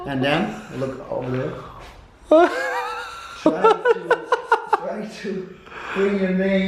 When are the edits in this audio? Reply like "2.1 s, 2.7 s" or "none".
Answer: none